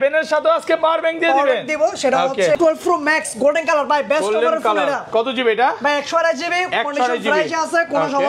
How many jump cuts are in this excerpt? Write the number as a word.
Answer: one